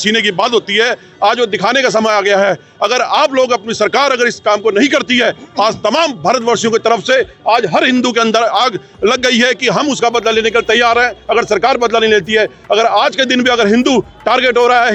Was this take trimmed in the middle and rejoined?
no; 0 cuts

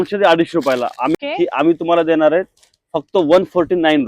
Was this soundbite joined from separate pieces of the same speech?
yes; 1 cut; at 1.1 s

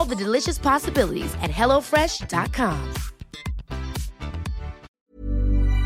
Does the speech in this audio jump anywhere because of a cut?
yes; 1 cut; at 4.9 s

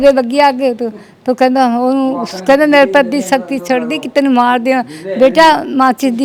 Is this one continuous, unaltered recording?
yes; 0 cuts

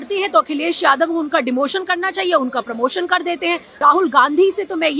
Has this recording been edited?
yes; 1 cut; at 3.7 s

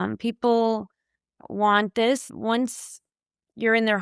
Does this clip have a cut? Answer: no; 0 cuts

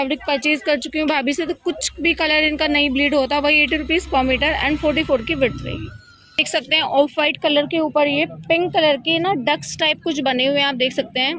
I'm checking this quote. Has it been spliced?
no; 0 cuts

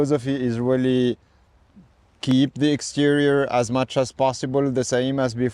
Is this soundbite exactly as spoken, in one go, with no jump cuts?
yes; 0 cuts

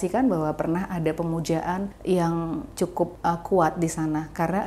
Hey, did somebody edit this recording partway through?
yes; 2 cuts; at 1.9 s, 2.9 s

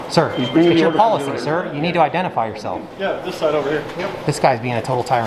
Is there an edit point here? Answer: no; 0 cuts

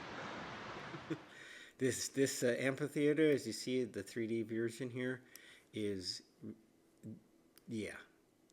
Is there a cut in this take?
yes; 1 cut; at 1.0 s

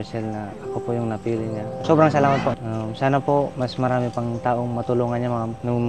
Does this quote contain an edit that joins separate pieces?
yes; 2 cuts; at 1.8 s, 2.7 s

